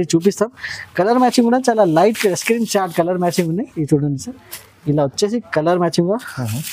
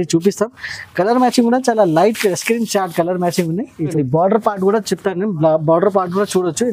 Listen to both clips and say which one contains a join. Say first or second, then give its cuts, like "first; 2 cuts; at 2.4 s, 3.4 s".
second; 1 cut; at 3.9 s